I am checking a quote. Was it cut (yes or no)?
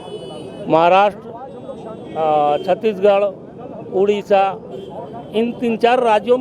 no